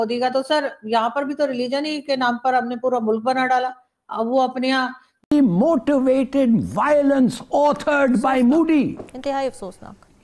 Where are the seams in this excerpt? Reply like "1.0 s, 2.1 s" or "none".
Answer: 5.1 s